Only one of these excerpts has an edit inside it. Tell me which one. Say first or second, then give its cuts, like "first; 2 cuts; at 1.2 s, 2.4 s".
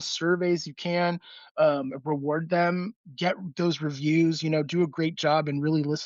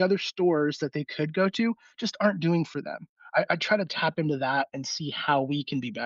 first; 1 cut; at 2.9 s